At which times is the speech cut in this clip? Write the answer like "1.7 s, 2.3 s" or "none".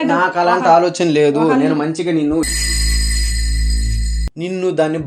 2.5 s, 4.3 s